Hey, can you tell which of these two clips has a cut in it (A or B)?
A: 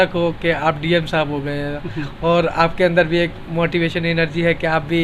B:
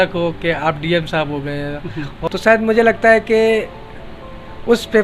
B